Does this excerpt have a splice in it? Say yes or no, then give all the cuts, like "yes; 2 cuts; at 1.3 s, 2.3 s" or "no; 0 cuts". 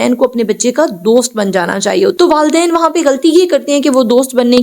yes; 1 cut; at 2.1 s